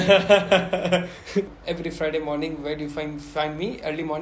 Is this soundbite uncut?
no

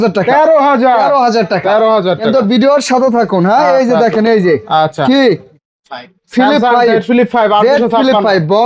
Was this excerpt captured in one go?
yes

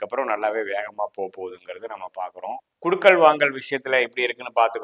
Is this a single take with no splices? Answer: no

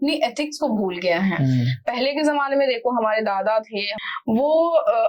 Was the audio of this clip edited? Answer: yes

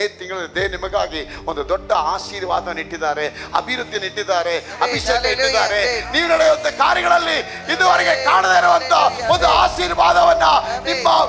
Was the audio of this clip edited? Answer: no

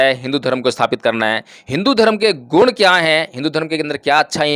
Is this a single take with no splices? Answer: yes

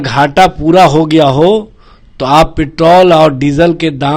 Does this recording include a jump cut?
no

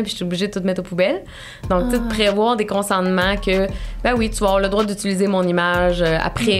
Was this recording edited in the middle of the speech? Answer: no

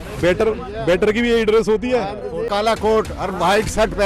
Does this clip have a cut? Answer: yes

